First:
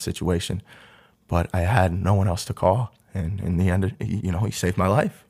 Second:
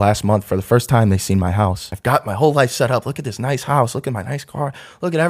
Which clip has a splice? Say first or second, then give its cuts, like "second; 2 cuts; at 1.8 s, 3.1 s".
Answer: second; 1 cut; at 1.9 s